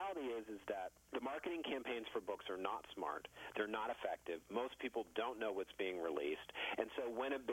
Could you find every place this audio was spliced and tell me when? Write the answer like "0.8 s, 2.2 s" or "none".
1.0 s